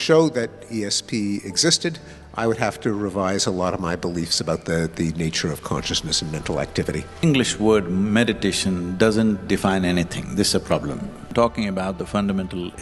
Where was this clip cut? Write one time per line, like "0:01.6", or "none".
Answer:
0:07.2
0:11.3